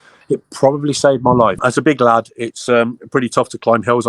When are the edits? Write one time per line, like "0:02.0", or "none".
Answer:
0:01.6